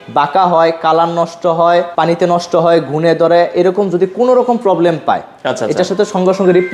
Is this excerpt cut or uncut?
cut